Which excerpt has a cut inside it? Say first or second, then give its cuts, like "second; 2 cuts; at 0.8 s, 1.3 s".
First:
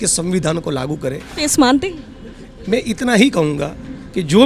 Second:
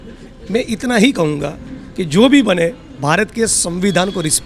first; 1 cut; at 1.3 s